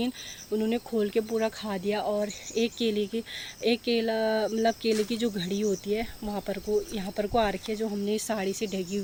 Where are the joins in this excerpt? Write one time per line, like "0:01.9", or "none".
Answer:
none